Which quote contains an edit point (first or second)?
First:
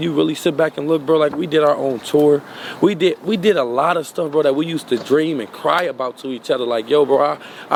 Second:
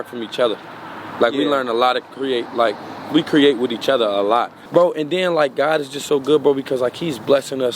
second